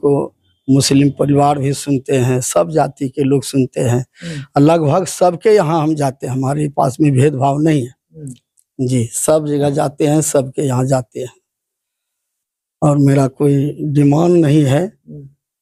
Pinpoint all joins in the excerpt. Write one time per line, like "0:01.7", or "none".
none